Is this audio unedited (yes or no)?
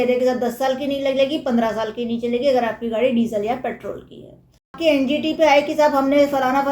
no